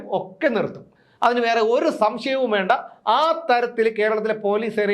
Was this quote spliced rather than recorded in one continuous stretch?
no; 0 cuts

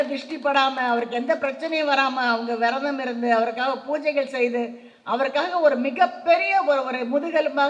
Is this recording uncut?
yes; 0 cuts

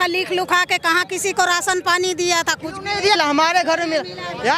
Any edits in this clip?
no; 0 cuts

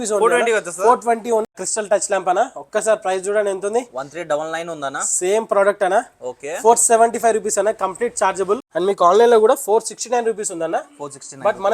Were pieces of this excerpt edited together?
yes; 2 cuts; at 1.5 s, 8.7 s

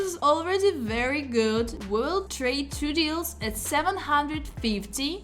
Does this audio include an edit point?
no; 0 cuts

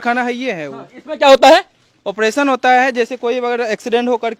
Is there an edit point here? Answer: no; 0 cuts

